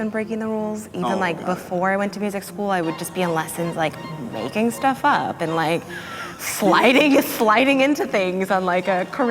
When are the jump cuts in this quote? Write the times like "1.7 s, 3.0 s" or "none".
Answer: none